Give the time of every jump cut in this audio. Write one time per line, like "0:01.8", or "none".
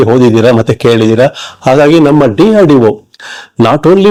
none